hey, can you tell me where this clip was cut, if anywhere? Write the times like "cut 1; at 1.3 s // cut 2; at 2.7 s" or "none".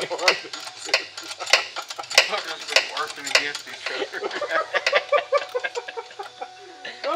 none